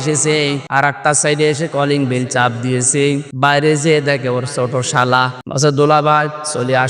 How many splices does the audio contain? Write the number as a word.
three